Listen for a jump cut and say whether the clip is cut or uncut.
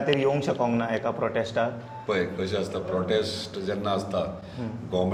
uncut